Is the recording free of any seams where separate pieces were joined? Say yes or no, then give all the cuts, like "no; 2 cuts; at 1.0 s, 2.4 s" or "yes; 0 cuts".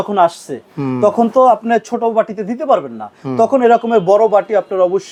yes; 0 cuts